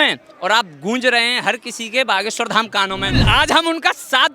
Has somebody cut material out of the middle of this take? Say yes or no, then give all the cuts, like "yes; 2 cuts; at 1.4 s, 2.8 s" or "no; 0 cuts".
yes; 1 cut; at 3.2 s